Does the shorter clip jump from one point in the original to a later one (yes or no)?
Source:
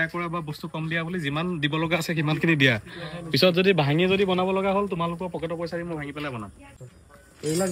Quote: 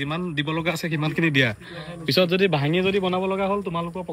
no